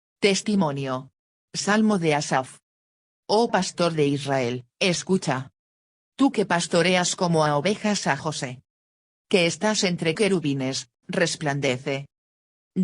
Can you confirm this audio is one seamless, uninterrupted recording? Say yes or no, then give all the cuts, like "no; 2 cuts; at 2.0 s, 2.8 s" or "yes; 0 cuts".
no; 2 cuts; at 2.9 s, 4.6 s